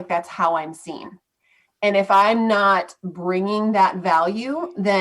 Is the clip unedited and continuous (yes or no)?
yes